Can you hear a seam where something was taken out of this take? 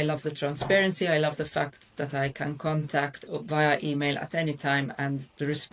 no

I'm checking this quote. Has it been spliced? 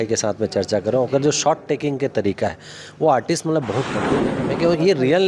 yes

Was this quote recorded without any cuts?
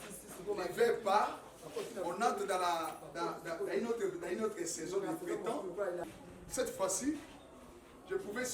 no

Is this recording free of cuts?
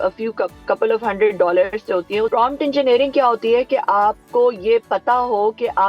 no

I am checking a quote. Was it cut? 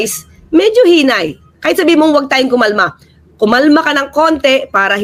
no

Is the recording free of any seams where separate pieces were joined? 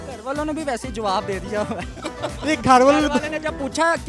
yes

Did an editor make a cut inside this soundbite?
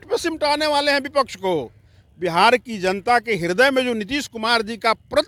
no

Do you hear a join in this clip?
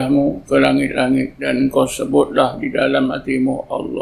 yes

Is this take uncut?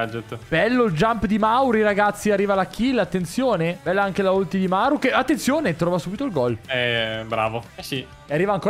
no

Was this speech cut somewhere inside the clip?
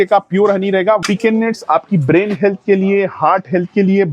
yes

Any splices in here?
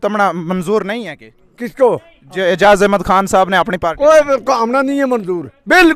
no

